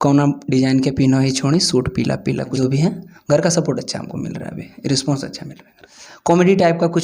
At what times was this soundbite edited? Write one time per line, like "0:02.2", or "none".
0:02.5
0:05.8